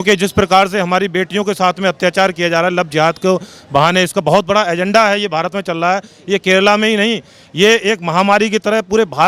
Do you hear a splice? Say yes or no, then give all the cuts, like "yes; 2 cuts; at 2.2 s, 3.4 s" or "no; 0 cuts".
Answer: no; 0 cuts